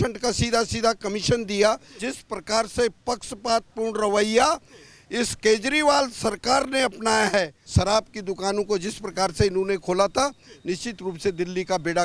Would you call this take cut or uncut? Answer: cut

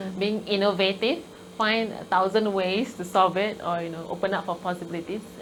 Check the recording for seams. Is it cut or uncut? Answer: uncut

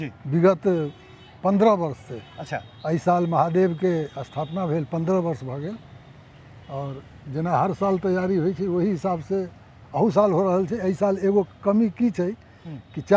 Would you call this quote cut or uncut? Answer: uncut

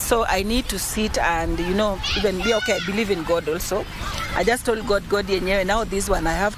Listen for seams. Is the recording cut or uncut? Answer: uncut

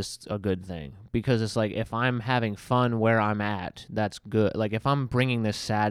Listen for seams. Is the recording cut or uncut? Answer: uncut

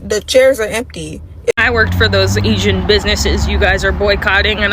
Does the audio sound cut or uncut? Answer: cut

